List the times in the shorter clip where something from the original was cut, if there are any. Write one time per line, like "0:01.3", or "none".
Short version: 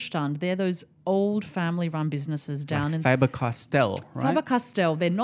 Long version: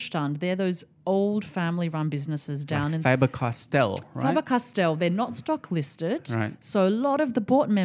none

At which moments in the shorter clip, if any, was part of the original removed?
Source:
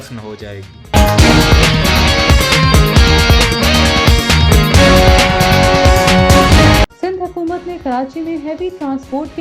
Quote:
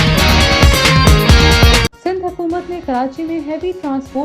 0:01.9

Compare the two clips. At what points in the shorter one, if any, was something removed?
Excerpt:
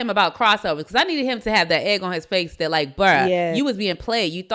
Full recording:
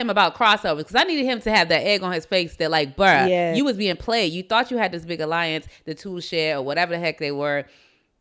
none

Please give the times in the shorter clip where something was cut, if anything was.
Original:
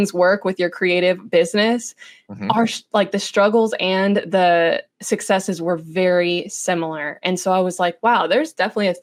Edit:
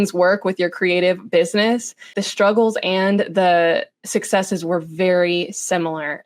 0:02.2

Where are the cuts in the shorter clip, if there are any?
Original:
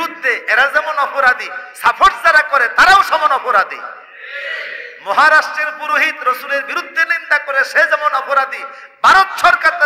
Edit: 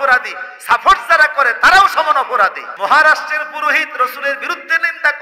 0:02.6

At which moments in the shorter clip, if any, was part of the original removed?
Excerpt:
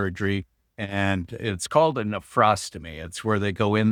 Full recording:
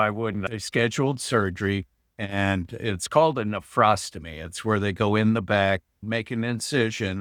none

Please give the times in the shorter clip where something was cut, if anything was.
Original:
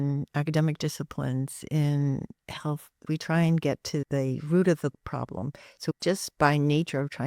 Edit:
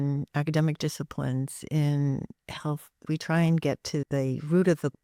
none

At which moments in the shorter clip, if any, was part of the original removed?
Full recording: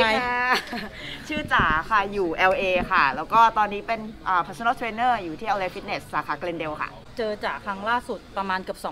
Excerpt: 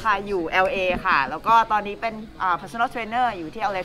none

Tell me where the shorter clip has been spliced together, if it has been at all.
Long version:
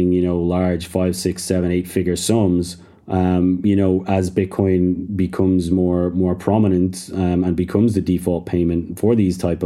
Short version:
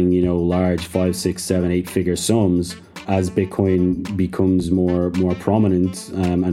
0:03.0

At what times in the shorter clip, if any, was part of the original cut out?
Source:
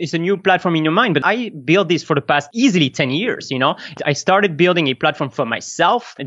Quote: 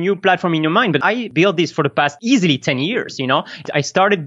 0:01.3

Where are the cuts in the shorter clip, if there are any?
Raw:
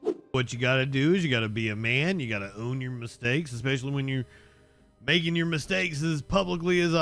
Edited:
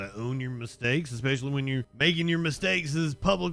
0:01.9

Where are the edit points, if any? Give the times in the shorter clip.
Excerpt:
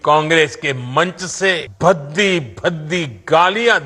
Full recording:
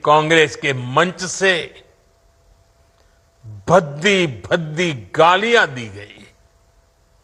0:01.7

